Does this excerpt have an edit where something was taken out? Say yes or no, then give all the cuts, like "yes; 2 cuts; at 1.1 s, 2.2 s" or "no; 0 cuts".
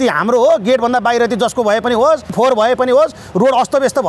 yes; 1 cut; at 2.3 s